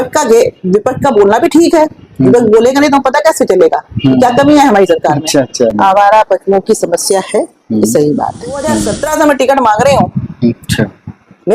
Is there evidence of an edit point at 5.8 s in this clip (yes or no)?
yes